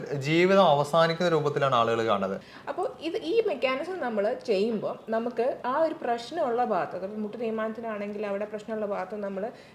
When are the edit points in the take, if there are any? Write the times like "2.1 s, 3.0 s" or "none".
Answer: 2.5 s